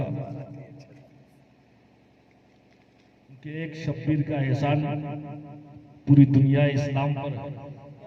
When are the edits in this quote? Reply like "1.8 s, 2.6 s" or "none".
3.5 s